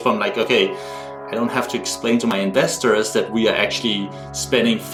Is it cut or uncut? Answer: uncut